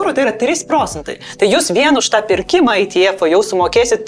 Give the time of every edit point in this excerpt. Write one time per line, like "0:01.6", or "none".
none